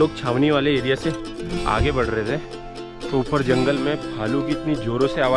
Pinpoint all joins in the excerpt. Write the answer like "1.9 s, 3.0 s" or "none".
none